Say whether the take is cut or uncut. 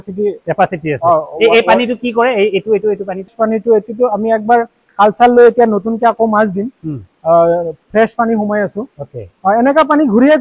uncut